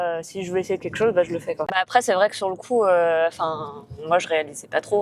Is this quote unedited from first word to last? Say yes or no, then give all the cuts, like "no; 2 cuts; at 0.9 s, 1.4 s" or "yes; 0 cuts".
no; 1 cut; at 1.8 s